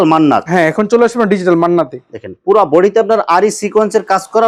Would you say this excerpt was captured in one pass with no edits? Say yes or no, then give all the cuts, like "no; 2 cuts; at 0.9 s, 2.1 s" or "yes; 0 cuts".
yes; 0 cuts